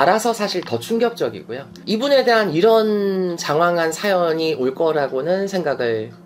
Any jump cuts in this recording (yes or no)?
no